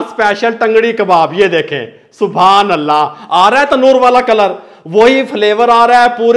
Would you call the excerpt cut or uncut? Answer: uncut